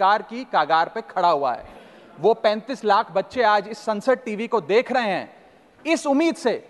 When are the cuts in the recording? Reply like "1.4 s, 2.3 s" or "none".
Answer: none